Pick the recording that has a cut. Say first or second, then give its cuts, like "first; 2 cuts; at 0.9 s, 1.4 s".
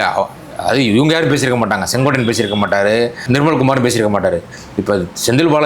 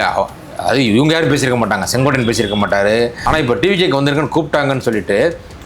second; 1 cut; at 3.2 s